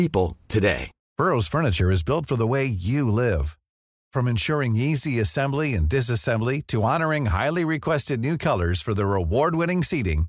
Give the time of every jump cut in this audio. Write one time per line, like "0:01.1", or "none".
0:01.0